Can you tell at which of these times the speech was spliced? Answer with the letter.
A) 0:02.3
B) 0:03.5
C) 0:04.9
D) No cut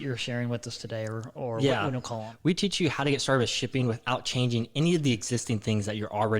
A